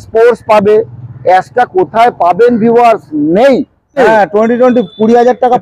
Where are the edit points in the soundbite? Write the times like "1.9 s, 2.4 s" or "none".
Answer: 4.0 s